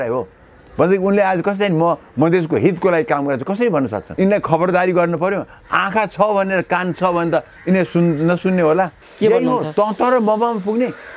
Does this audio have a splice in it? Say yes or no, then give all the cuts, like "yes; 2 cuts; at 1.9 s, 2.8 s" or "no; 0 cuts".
yes; 2 cuts; at 4.0 s, 9.0 s